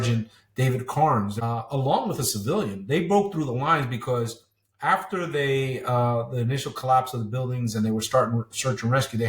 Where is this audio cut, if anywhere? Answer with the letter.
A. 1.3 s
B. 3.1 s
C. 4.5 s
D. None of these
A